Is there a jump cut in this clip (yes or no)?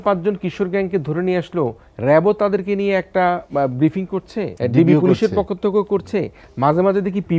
yes